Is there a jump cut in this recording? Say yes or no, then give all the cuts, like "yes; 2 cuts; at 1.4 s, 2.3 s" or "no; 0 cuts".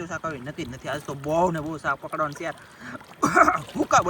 no; 0 cuts